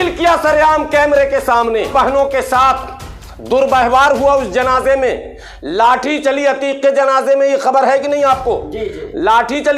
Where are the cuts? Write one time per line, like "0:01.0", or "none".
0:01.9